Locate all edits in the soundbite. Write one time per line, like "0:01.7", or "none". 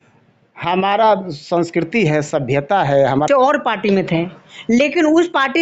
0:03.3